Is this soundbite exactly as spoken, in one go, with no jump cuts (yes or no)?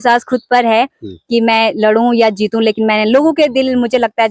yes